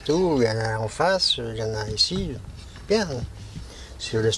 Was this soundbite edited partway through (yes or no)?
yes